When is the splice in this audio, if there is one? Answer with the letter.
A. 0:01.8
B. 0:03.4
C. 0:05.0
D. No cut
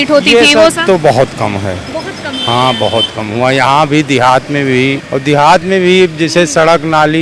C